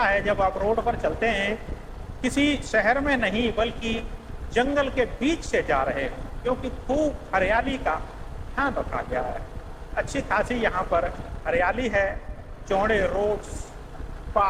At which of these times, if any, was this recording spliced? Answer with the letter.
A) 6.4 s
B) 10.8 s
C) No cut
C